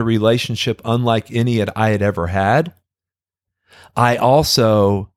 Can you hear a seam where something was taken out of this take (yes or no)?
no